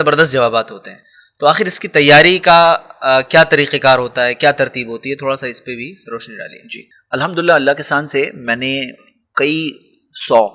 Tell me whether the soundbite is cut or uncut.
uncut